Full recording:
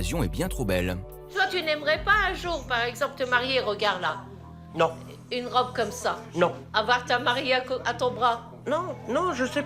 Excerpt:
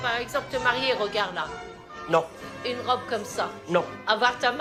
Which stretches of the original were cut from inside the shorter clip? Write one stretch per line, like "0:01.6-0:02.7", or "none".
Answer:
none